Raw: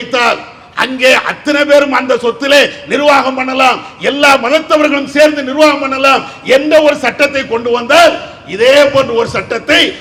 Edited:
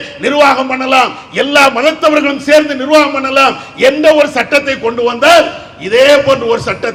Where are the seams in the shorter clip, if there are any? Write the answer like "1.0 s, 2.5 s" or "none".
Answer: none